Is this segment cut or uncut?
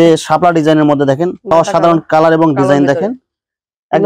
cut